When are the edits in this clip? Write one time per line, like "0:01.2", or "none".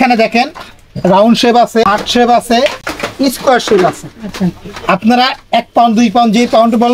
0:01.8